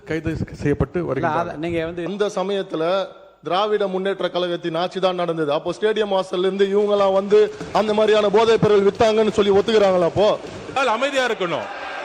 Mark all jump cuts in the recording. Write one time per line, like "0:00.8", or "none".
0:02.1
0:10.7